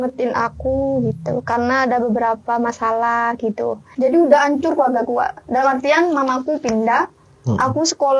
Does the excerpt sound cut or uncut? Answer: cut